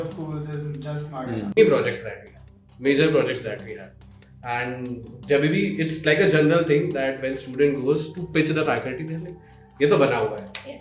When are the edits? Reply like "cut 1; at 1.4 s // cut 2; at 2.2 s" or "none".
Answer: cut 1; at 1.6 s